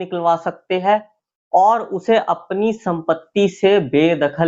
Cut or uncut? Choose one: uncut